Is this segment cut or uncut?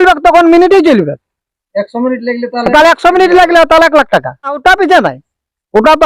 cut